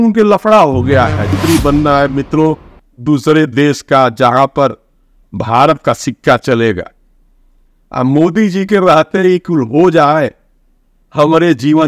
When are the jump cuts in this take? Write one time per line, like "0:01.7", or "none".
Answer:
0:01.3